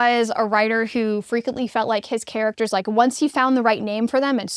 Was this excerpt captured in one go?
yes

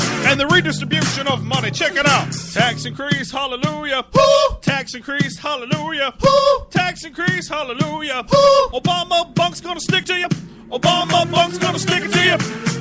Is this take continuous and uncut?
no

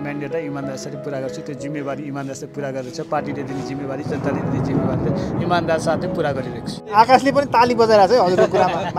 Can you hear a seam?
yes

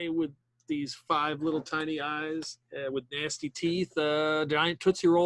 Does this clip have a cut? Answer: yes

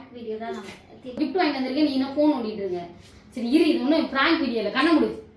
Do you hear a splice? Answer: yes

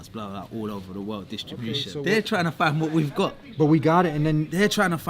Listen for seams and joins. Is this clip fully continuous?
no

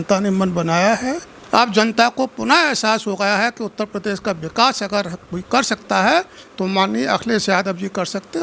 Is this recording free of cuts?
no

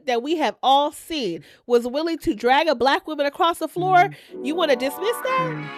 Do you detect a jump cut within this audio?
no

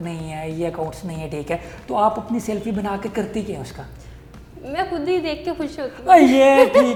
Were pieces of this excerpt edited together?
no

